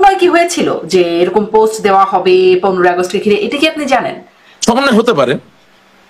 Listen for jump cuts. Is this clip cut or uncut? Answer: uncut